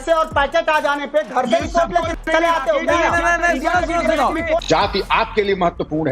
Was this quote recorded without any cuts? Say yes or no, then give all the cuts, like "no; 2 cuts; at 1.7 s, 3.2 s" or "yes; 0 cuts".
no; 2 cuts; at 3.3 s, 4.6 s